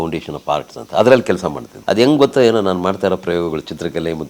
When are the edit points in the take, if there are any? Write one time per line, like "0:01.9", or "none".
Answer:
0:01.7